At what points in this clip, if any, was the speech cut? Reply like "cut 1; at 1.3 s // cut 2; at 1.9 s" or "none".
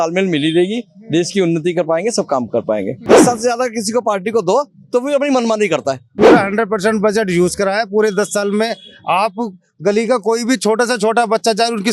cut 1; at 3.0 s // cut 2; at 6.1 s